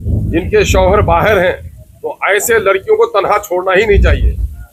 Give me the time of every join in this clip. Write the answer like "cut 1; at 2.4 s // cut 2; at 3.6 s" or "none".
none